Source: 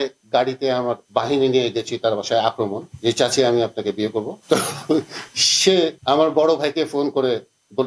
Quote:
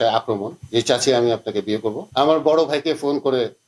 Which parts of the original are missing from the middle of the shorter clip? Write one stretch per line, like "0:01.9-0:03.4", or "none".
0:04.4-0:06.0

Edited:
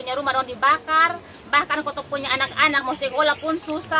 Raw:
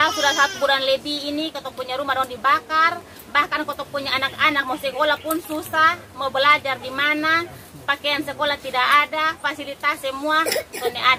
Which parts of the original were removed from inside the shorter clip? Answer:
none

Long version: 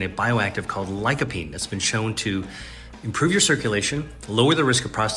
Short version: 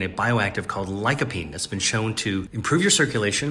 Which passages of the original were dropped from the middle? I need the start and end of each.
0:02.6-0:03.0

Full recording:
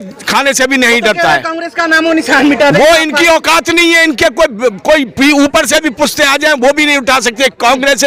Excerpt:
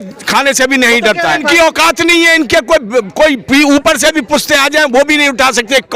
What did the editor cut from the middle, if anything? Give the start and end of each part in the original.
0:01.4-0:03.1

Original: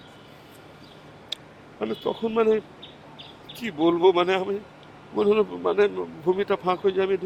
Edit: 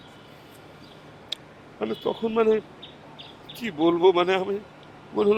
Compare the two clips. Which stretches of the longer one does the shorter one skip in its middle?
none

